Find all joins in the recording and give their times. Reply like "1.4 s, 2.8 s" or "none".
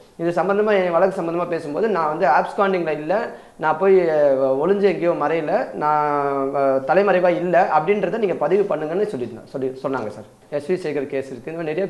10.3 s